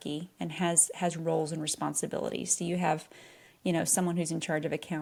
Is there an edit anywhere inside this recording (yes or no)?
no